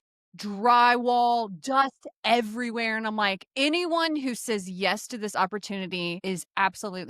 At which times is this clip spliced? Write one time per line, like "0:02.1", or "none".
0:06.2